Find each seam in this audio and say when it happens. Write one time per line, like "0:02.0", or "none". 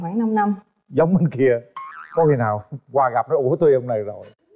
none